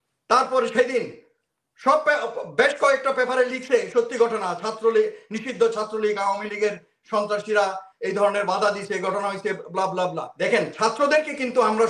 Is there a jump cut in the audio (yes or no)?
yes